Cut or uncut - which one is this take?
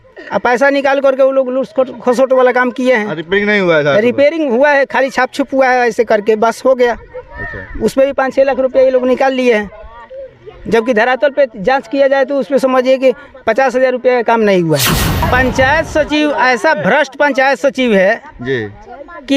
cut